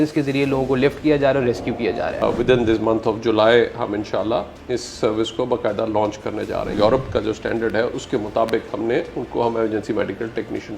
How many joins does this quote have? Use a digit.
2